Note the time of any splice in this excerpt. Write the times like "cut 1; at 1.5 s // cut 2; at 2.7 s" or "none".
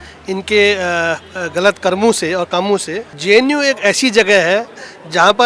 cut 1; at 3.1 s